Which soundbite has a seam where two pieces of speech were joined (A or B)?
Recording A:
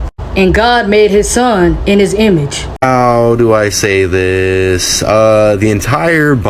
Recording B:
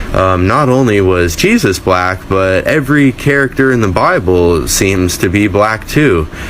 A